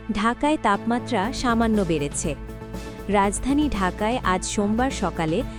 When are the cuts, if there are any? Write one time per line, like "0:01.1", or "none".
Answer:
none